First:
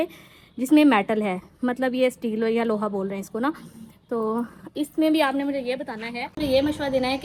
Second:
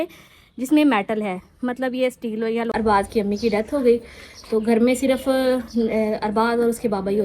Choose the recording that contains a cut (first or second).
second